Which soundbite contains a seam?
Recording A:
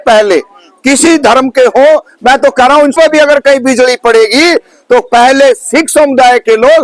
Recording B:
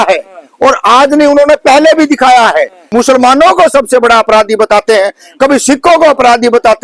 B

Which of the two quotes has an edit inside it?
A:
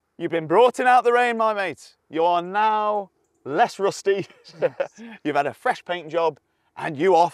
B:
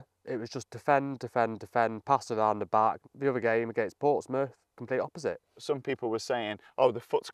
B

